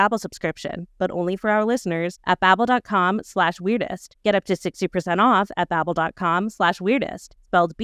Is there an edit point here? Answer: no; 0 cuts

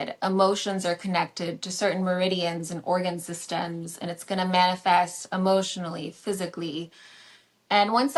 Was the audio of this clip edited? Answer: no; 0 cuts

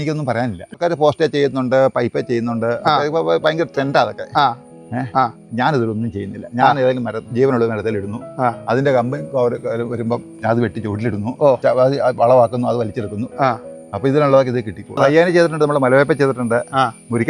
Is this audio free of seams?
no; 2 cuts; at 11.6 s, 14.9 s

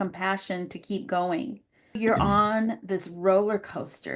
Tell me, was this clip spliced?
yes; 1 cut; at 2.0 s

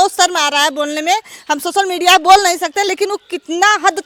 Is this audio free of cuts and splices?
yes; 0 cuts

